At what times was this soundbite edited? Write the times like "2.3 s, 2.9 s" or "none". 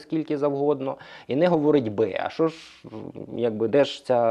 none